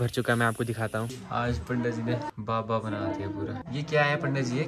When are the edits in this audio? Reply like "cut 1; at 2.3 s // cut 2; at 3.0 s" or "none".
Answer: cut 1; at 1.2 s // cut 2; at 2.3 s // cut 3; at 3.6 s